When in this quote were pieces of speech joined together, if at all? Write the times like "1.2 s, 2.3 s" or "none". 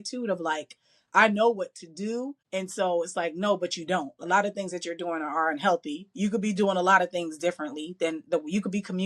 2.4 s